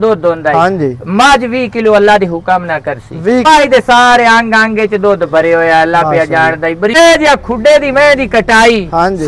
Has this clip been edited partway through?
yes; 2 cuts; at 3.4 s, 6.9 s

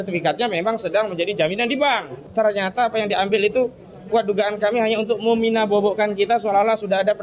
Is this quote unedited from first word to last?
no; 1 cut; at 2.2 s

